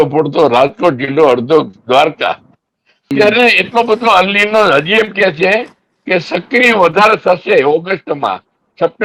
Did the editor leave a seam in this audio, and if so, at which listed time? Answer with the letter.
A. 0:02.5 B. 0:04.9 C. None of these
C